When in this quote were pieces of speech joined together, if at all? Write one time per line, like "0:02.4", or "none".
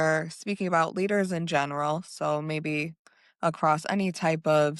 none